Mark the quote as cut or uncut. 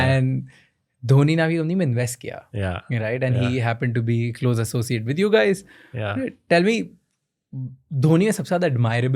uncut